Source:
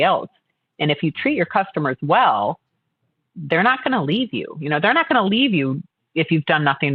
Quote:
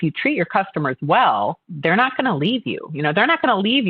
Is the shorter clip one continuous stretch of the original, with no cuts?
no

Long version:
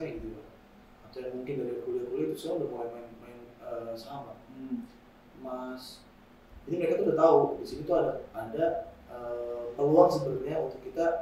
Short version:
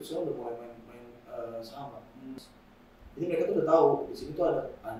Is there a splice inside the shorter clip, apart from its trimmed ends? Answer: yes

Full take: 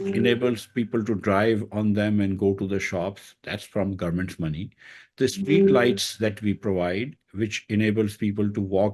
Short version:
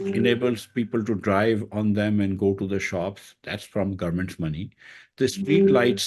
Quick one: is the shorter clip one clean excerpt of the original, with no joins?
yes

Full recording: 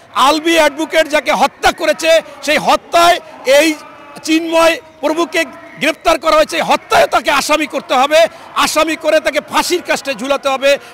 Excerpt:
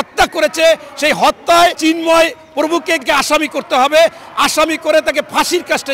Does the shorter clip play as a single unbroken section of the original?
no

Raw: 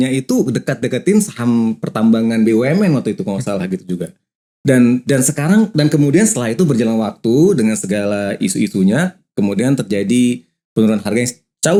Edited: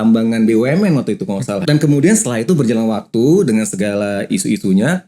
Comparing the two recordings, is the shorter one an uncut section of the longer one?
no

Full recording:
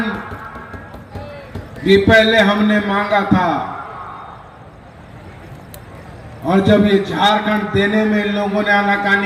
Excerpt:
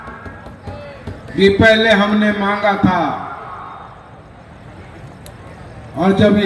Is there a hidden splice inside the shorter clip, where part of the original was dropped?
no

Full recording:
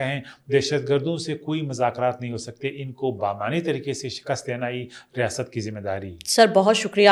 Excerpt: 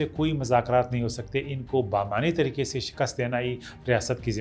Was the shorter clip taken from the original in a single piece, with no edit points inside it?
yes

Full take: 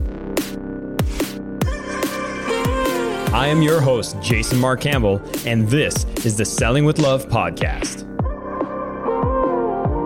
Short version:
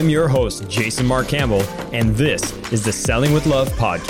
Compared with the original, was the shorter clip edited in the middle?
no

